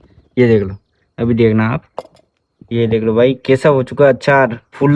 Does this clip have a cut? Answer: no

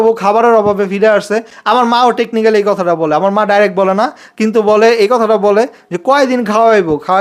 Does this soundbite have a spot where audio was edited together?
no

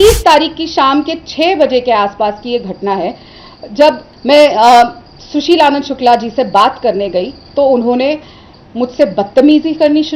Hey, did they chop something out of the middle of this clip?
yes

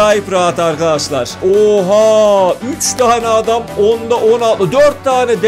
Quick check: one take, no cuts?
no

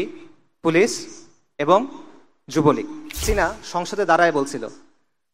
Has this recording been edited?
yes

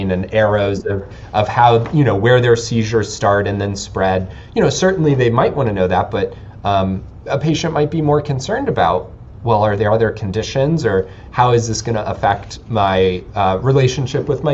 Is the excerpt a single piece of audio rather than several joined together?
yes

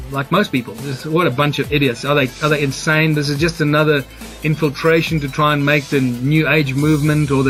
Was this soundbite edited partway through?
no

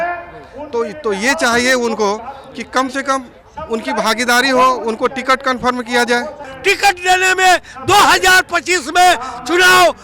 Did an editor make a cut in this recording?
yes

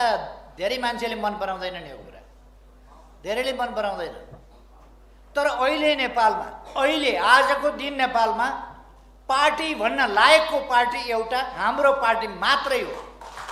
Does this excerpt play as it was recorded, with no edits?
yes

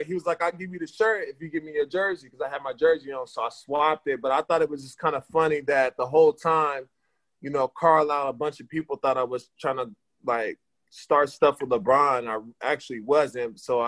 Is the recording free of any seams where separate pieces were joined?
yes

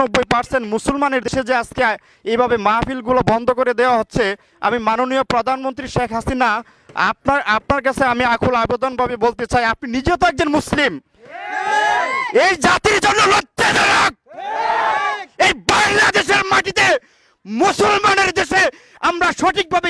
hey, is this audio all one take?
no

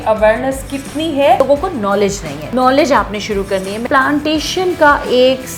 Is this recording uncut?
no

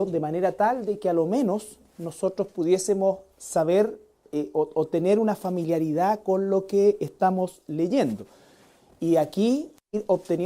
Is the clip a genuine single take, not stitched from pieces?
no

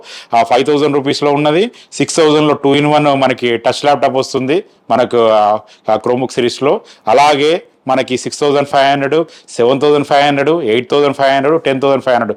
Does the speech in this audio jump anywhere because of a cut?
no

